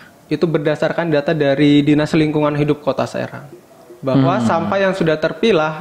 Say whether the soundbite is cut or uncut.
cut